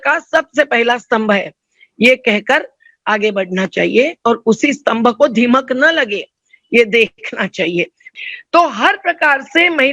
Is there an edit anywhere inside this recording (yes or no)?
yes